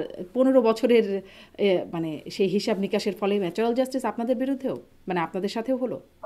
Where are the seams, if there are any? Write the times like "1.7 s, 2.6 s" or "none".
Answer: none

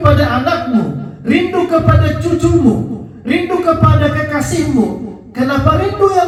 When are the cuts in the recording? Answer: none

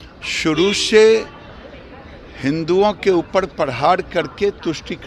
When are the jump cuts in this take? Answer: none

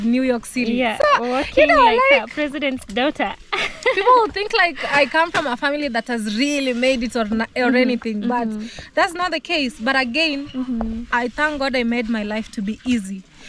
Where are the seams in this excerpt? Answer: none

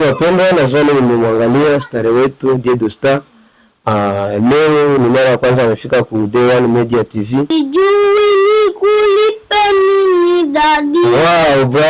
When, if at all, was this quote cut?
7.5 s

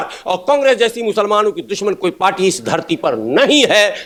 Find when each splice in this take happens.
none

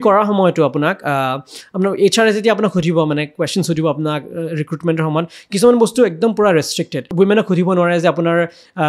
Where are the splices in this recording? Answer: 7.1 s

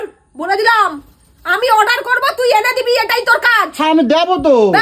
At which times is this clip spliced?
none

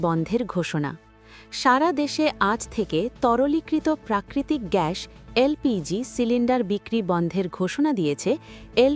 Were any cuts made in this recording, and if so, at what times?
none

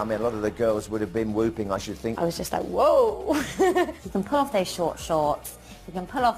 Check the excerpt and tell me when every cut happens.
2.2 s, 4.0 s

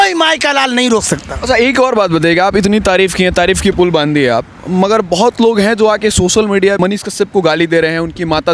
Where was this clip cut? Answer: none

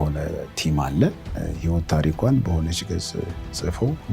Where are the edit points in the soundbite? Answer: 1.3 s

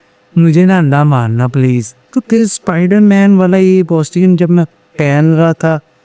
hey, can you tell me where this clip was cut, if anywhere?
2.0 s

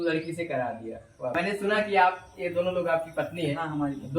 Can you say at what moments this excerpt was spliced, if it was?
1.3 s

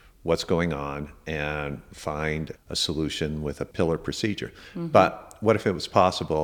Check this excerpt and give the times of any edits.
2.6 s, 3.7 s

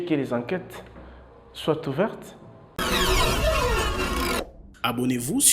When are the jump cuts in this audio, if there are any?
2.7 s

